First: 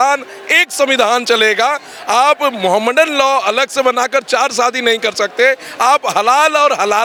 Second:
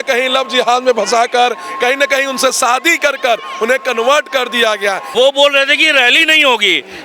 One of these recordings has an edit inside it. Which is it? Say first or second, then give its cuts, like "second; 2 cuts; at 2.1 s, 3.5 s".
second; 1 cut; at 5.0 s